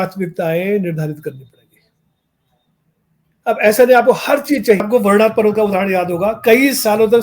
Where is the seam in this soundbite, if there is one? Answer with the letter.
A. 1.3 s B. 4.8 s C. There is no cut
B